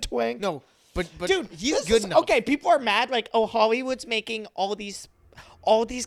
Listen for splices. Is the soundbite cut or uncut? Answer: uncut